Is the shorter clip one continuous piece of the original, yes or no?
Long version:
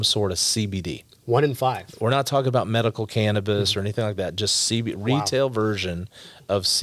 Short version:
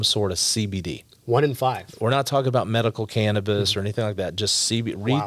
yes